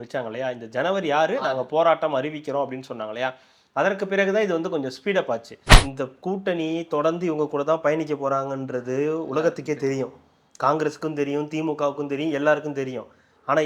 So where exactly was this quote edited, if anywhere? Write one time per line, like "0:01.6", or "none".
0:05.6